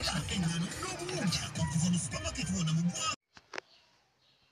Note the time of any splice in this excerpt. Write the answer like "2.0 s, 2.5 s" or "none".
3.1 s

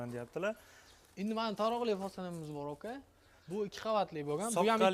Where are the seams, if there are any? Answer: none

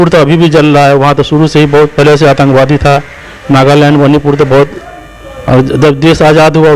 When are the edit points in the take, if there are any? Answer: none

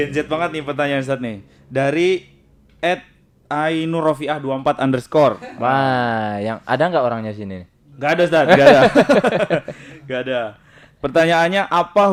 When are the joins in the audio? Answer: none

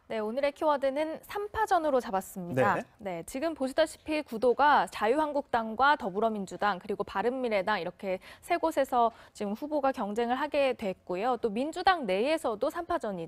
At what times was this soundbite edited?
2.9 s

